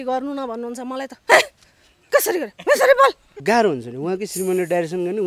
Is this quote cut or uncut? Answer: cut